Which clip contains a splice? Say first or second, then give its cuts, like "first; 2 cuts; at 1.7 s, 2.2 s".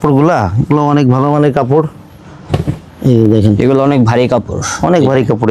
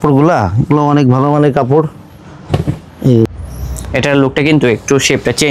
second; 1 cut; at 3.3 s